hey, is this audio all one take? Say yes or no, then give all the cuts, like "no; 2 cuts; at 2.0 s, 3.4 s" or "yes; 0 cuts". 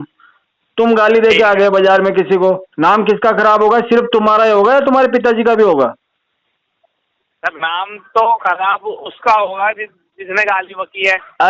yes; 0 cuts